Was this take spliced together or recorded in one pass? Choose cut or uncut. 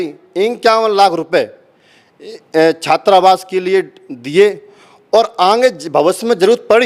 uncut